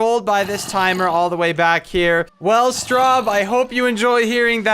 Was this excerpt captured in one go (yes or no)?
no